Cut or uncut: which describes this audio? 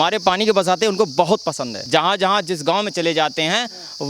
cut